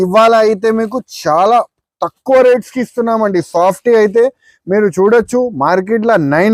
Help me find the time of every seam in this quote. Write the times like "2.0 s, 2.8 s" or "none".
none